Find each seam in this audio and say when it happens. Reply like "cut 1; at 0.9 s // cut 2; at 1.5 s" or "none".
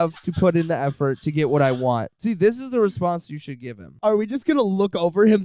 cut 1; at 2.2 s // cut 2; at 3.9 s